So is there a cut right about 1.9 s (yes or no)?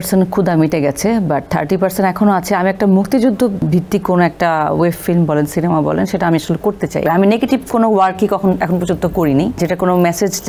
no